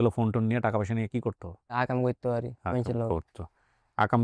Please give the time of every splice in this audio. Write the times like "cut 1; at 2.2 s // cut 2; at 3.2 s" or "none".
cut 1; at 1.7 s